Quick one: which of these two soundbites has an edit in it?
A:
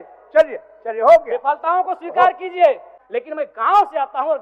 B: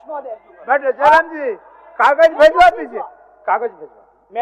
A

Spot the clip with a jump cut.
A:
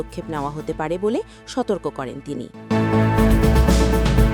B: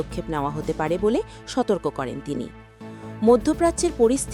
A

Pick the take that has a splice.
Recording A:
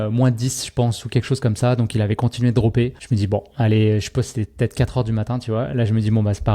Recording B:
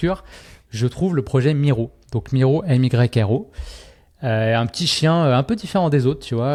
A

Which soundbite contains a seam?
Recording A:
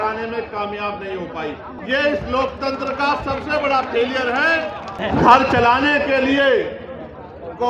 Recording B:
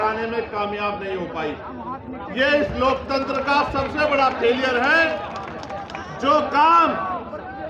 A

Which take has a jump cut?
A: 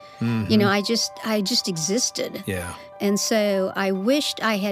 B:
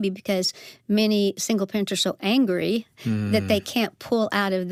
A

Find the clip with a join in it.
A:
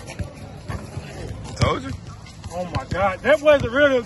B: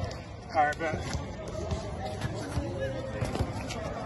B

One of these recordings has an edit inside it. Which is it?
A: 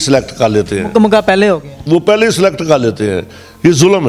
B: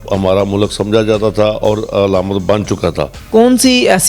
B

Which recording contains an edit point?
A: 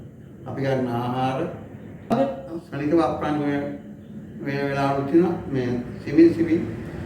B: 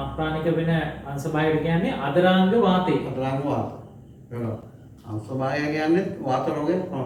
A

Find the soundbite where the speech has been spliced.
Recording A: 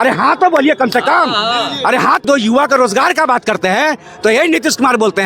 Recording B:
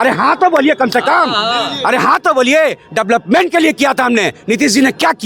A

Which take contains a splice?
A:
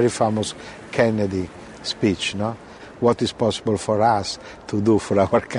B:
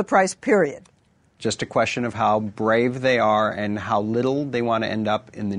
A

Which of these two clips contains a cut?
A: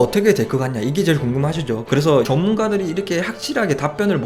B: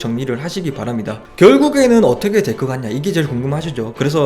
B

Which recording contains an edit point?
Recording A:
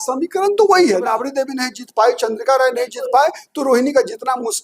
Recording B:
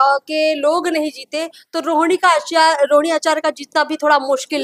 A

